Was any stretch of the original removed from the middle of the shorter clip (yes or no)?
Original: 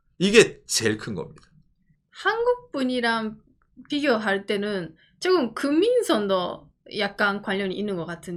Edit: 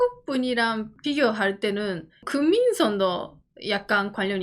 yes